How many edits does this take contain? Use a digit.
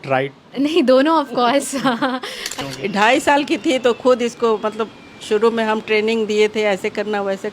1